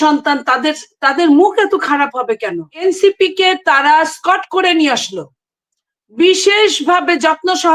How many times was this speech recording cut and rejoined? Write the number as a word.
one